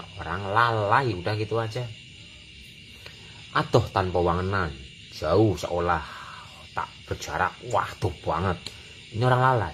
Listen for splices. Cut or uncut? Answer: uncut